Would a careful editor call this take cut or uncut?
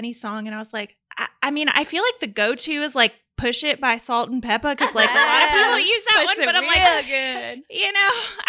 uncut